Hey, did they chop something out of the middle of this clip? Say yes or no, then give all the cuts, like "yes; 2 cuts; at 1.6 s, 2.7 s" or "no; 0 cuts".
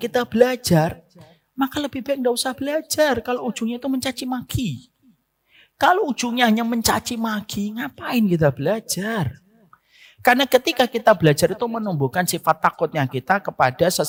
no; 0 cuts